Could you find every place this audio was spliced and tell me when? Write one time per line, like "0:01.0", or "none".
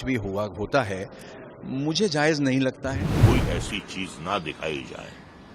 0:03.2